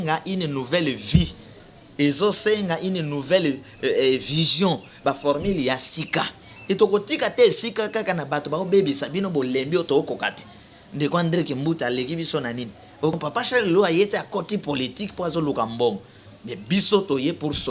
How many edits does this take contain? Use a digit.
1